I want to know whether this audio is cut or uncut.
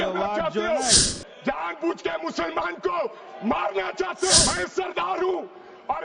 cut